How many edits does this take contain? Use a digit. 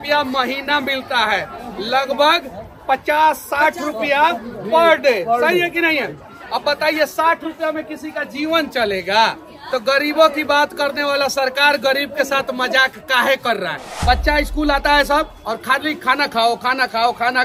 1